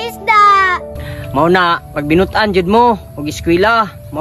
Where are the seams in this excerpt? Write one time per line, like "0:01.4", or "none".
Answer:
0:01.1

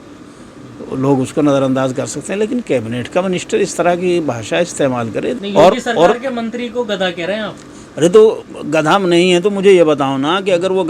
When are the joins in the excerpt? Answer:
0:05.4

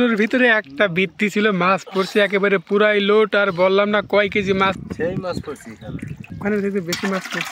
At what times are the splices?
0:04.8
0:06.4

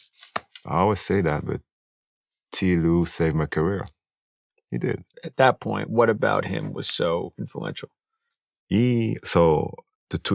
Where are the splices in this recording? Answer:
0:05.2

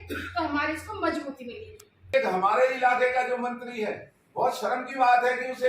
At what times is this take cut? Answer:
0:02.1

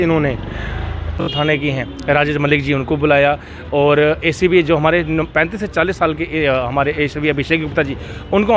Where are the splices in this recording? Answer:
0:01.3

